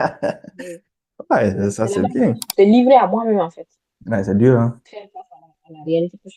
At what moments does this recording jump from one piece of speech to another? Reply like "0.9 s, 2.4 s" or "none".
2.4 s